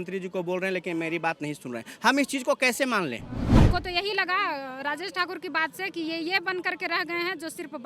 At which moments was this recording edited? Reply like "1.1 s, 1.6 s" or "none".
3.4 s